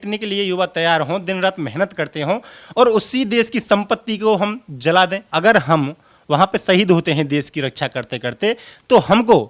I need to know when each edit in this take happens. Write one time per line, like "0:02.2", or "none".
0:05.2